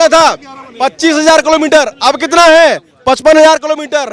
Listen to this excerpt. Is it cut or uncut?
uncut